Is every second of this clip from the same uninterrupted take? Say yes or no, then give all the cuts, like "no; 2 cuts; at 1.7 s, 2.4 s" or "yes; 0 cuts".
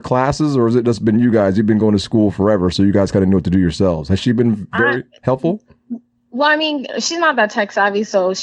yes; 0 cuts